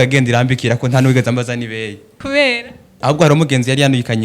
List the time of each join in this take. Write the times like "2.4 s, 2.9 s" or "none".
2.1 s, 2.9 s